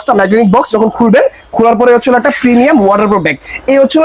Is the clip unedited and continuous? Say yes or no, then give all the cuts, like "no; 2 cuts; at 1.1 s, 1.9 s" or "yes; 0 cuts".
yes; 0 cuts